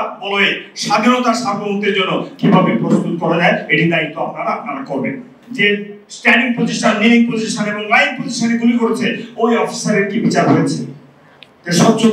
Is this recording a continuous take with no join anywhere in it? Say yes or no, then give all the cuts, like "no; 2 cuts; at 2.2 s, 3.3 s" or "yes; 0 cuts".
no; 1 cut; at 5.4 s